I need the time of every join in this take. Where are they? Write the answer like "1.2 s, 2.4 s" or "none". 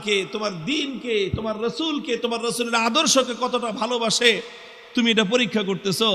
none